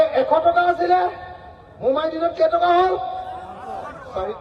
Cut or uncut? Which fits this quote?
uncut